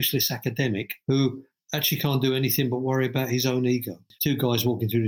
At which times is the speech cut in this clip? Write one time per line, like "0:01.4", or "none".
0:04.1

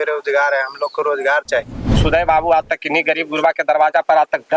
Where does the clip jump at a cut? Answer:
0:02.0

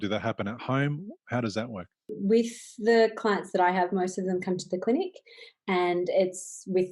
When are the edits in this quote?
0:02.2

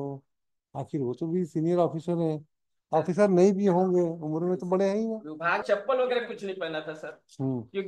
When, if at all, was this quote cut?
0:05.6

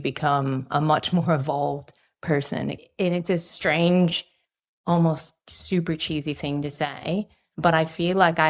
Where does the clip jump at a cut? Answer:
0:02.8
0:07.4

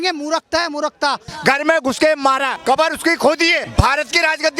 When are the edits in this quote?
0:01.3
0:02.5
0:03.7

